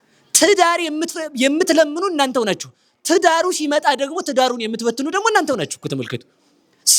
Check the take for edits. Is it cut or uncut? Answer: uncut